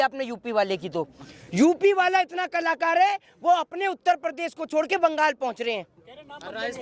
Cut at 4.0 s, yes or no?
no